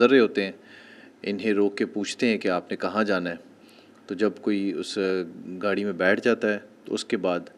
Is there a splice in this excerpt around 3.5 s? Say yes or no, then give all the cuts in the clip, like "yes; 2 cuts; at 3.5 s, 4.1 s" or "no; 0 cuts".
no; 0 cuts